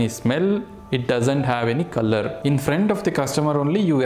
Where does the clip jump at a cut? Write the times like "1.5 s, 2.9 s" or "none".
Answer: 2.3 s